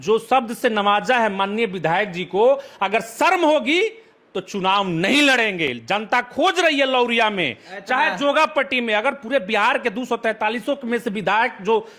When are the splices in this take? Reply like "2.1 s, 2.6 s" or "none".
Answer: none